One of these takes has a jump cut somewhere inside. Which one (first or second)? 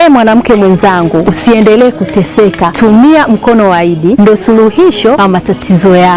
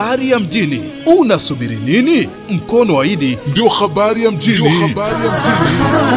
first